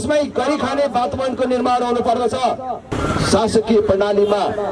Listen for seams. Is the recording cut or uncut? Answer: cut